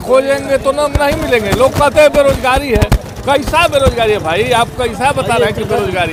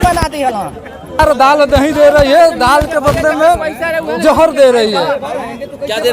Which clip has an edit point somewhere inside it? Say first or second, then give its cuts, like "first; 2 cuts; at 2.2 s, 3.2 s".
second; 1 cut; at 1.2 s